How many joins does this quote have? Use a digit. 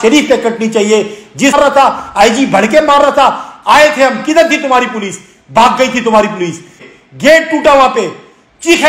2